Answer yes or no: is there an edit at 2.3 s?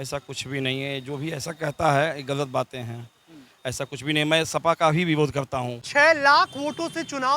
no